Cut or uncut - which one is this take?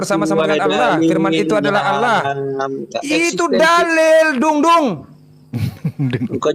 uncut